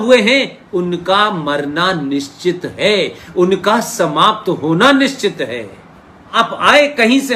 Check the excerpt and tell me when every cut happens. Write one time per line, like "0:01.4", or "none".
0:06.4

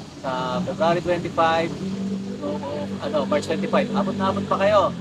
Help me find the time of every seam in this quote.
none

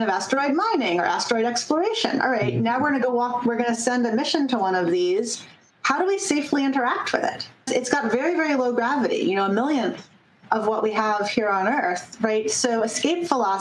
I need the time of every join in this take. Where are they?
0:07.7

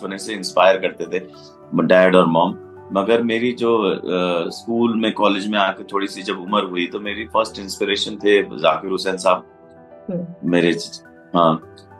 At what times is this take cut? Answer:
none

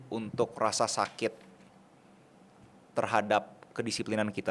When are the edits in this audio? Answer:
none

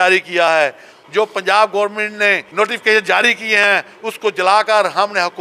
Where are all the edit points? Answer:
0:00.9
0:02.4

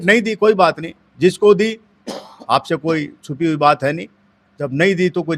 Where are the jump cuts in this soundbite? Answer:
none

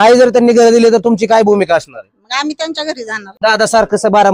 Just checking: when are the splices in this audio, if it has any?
0:03.2

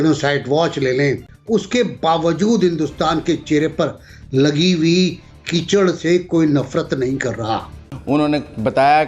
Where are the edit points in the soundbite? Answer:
0:01.3
0:08.0

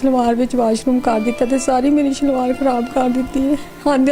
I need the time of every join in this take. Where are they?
none

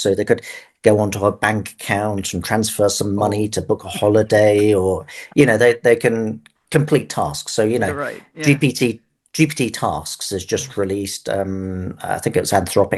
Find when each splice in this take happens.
none

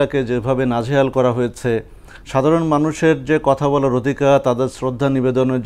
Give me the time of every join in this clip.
none

